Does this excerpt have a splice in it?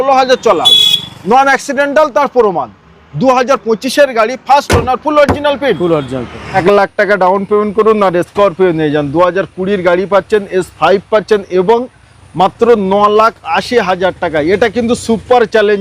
yes; 1 cut; at 6.6 s

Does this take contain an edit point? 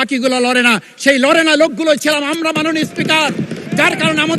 no; 0 cuts

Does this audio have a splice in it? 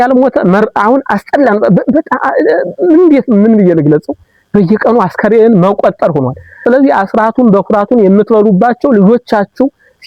yes; 1 cut; at 6.6 s

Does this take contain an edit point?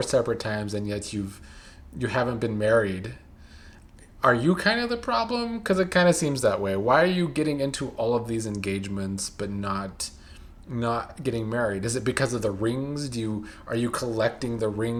no; 0 cuts

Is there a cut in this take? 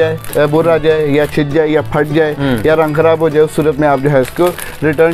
no; 0 cuts

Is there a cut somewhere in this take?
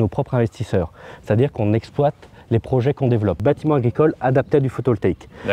yes; 1 cut; at 3.4 s

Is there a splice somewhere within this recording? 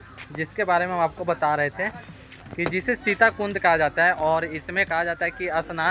no; 0 cuts

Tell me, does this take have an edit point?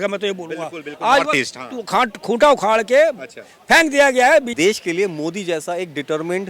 yes; 1 cut; at 4.5 s

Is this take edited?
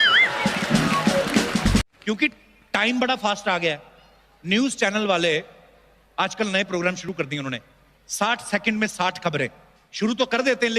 yes; 1 cut; at 1.9 s

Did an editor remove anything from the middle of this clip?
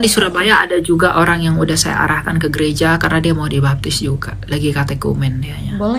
no; 0 cuts

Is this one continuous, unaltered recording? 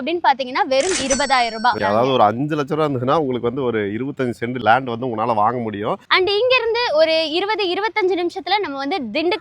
no; 3 cuts; at 1.8 s, 4.6 s, 6.0 s

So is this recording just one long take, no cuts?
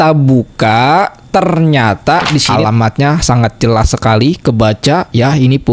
no; 1 cut; at 2.5 s

